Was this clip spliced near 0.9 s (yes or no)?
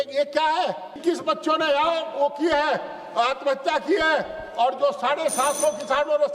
yes